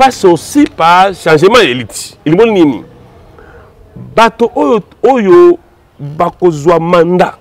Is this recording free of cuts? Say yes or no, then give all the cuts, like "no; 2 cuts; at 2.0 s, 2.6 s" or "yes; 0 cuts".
yes; 0 cuts